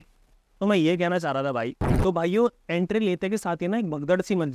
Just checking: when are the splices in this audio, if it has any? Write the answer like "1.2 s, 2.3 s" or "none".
1.8 s